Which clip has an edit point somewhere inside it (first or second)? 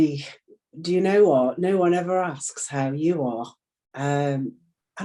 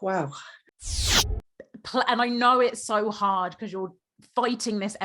second